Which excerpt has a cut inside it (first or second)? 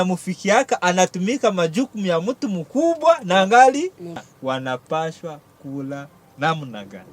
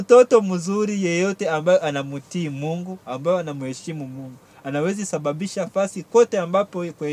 first